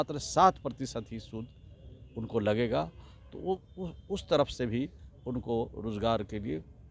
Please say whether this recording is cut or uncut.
uncut